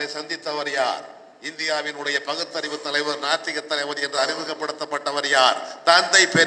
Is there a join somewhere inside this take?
no; 0 cuts

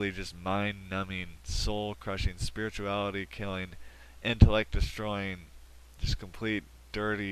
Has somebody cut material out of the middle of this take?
no; 0 cuts

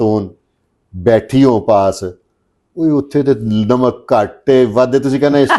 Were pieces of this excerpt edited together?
no; 0 cuts

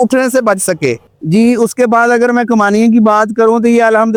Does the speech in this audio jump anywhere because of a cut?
no; 0 cuts

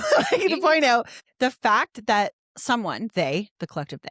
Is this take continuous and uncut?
no; 2 cuts; at 1.2 s, 2.5 s

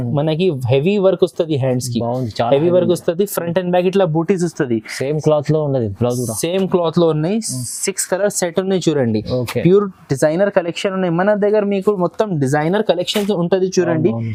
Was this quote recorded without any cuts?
yes; 0 cuts

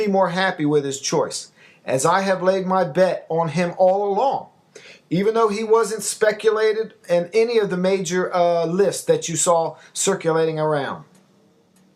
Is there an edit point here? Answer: yes; 1 cut; at 4.9 s

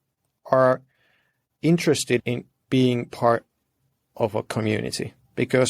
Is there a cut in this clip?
yes; 1 cut; at 2.2 s

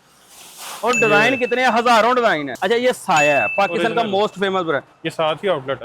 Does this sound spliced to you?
yes; 2 cuts; at 2.5 s, 5.0 s

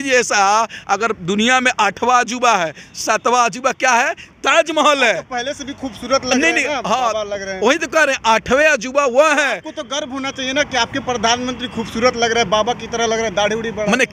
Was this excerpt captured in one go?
yes; 0 cuts

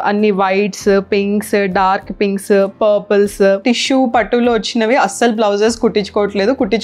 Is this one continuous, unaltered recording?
no; 1 cut; at 3.6 s

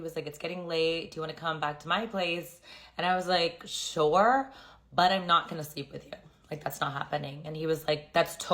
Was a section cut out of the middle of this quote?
yes; 1 cut; at 5.1 s

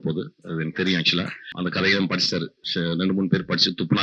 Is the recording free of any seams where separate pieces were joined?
no; 2 cuts; at 1.5 s, 2.6 s

